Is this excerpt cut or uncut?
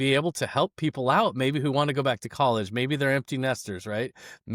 uncut